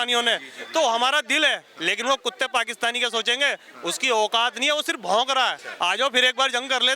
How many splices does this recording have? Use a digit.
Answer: 2